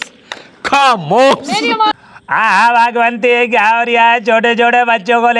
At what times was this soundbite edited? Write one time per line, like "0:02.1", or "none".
0:02.0